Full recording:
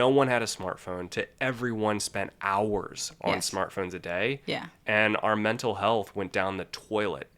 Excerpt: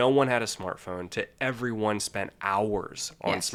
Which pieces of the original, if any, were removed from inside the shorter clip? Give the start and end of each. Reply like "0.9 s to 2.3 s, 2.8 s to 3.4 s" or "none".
none